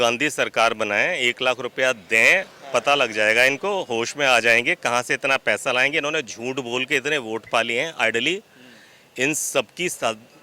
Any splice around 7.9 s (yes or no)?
no